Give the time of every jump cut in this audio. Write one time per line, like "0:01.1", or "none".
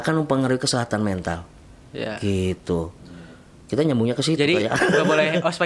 none